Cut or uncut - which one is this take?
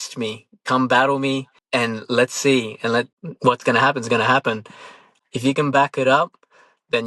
cut